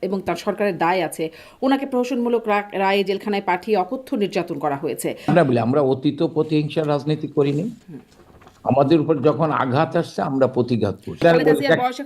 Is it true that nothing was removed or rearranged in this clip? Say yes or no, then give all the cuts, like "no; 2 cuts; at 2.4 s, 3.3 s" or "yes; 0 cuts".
no; 2 cuts; at 5.3 s, 11.2 s